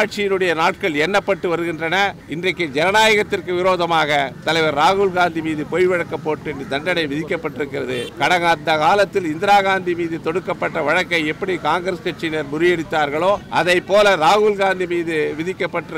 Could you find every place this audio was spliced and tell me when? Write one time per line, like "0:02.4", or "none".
0:02.2
0:08.1
0:13.4